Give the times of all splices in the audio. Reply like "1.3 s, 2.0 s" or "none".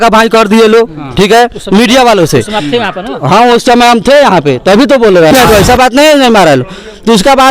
5.3 s